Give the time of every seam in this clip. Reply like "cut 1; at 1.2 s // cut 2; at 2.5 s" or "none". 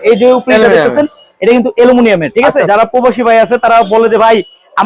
cut 1; at 2.7 s